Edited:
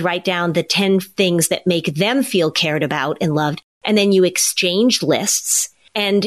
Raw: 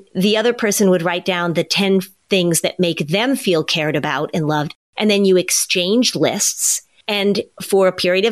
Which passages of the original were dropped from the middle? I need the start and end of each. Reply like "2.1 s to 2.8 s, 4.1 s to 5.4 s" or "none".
2.1 s to 2.2 s